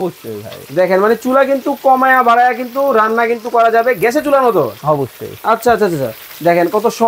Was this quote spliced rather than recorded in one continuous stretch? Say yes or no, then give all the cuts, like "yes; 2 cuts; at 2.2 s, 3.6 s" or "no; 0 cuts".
no; 0 cuts